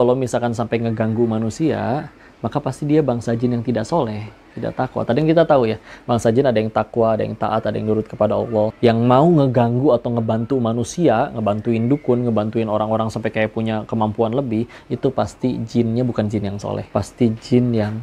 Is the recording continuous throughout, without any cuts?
yes; 0 cuts

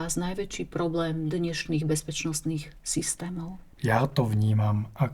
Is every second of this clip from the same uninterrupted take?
no; 1 cut; at 3.7 s

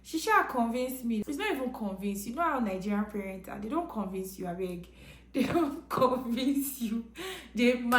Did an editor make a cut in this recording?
yes; 1 cut; at 1.2 s

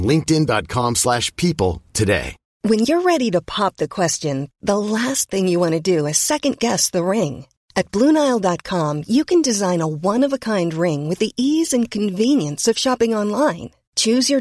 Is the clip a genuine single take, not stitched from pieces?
no; 1 cut; at 2.4 s

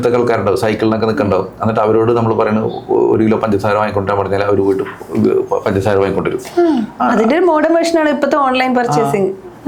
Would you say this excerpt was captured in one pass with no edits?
yes; 0 cuts

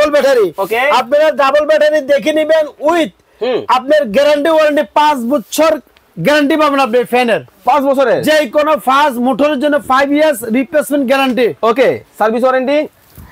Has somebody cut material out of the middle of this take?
no; 0 cuts

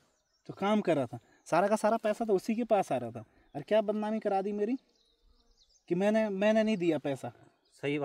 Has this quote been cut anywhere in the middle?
no; 0 cuts

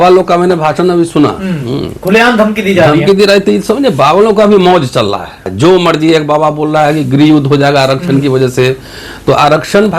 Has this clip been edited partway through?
yes; 1 cut; at 5.5 s

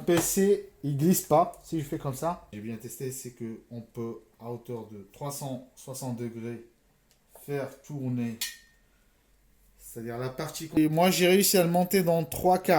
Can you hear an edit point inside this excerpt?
yes; 2 cuts; at 2.6 s, 10.8 s

